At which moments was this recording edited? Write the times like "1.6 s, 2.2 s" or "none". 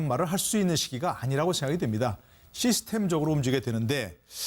none